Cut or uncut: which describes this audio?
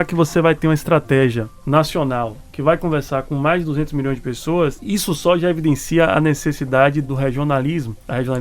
cut